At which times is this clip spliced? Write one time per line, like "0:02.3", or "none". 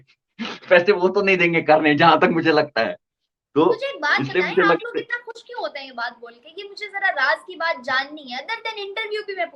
none